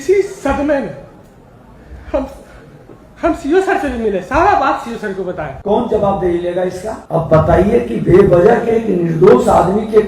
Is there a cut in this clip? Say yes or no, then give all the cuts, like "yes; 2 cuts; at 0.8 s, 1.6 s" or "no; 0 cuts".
yes; 2 cuts; at 5.5 s, 6.9 s